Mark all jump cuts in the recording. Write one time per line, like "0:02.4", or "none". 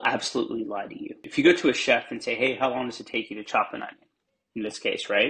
0:01.2